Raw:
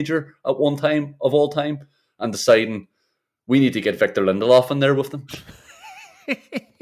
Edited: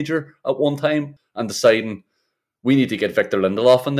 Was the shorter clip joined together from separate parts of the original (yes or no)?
yes